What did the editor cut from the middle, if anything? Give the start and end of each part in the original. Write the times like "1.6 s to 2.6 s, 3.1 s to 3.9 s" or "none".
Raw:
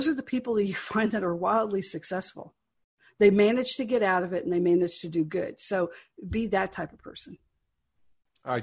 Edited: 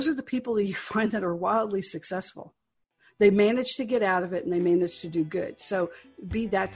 none